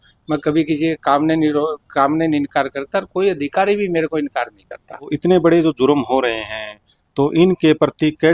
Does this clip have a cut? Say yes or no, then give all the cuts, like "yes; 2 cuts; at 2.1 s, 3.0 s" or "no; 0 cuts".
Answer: yes; 1 cut; at 5.1 s